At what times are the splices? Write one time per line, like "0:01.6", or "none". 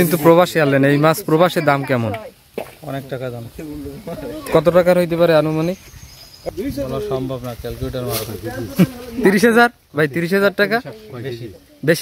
0:06.4